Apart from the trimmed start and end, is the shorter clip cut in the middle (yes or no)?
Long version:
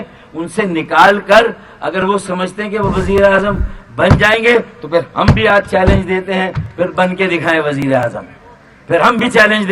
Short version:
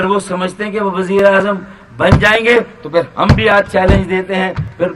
no